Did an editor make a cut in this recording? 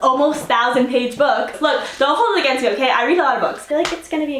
yes; 2 cuts; at 1.6 s, 3.7 s

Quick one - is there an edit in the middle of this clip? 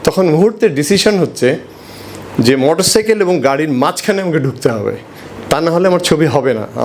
no; 0 cuts

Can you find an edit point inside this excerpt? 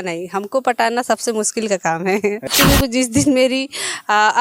yes; 1 cut; at 2.5 s

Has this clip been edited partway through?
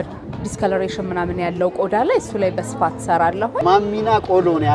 yes; 1 cut; at 3.6 s

